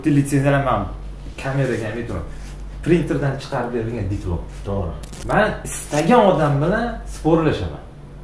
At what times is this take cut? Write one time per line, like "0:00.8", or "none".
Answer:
0:05.1